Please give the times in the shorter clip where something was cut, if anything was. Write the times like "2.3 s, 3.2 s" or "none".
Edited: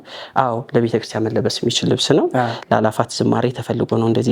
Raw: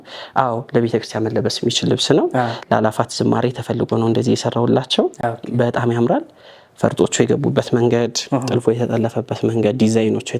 none